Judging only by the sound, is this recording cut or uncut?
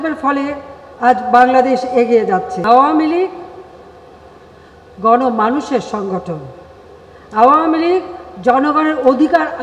cut